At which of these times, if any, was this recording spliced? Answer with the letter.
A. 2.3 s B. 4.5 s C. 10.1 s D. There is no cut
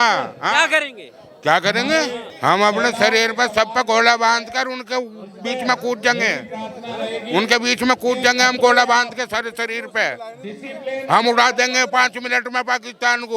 A